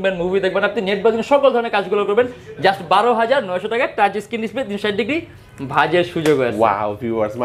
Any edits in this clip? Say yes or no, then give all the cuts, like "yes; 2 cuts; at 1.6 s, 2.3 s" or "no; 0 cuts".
no; 0 cuts